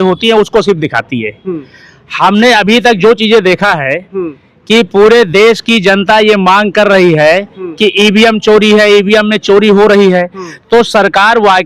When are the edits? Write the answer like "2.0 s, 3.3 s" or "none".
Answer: none